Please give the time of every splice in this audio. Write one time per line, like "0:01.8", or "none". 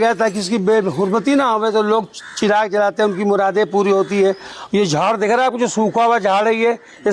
none